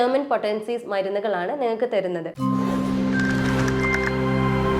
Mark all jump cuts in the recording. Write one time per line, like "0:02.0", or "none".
0:02.3